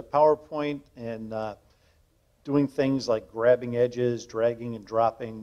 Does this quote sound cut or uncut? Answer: uncut